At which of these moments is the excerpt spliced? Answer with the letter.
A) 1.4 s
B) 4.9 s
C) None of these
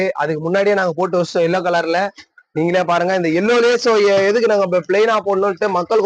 C